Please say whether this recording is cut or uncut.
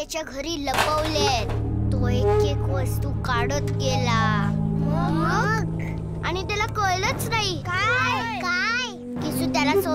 cut